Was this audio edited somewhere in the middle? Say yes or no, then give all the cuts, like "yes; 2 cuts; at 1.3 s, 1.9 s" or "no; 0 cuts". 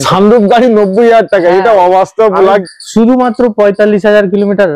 yes; 1 cut; at 2.6 s